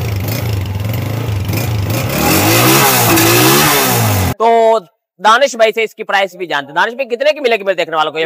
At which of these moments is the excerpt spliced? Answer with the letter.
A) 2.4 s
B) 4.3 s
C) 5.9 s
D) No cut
B